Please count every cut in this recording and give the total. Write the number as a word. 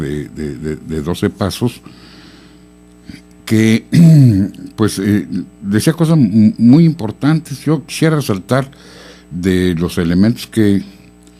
zero